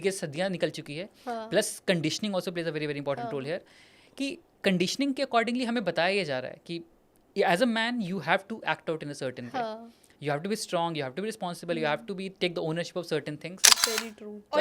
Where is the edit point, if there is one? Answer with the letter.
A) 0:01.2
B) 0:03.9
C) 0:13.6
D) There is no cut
C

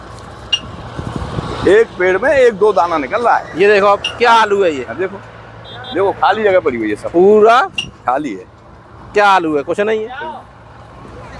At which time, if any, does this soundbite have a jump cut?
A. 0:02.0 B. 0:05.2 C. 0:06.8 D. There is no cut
D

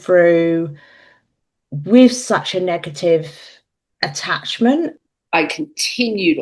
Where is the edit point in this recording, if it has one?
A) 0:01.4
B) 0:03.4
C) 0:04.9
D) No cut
C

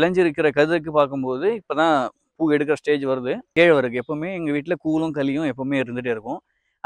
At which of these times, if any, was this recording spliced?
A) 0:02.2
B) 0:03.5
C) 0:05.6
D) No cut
B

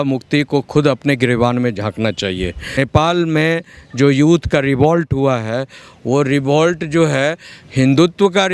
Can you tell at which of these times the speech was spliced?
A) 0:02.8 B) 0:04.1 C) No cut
A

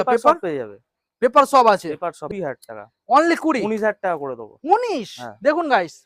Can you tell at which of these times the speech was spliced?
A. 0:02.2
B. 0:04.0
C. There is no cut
A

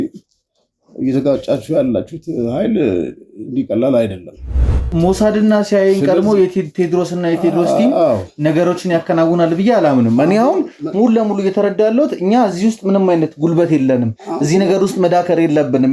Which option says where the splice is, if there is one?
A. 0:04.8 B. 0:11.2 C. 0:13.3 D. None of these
A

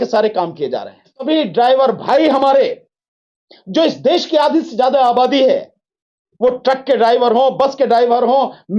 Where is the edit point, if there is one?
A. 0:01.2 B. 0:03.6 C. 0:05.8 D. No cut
A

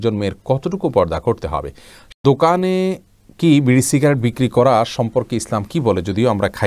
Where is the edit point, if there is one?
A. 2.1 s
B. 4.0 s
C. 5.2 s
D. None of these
A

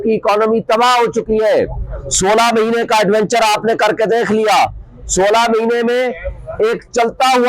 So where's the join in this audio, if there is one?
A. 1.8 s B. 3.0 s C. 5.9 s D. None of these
D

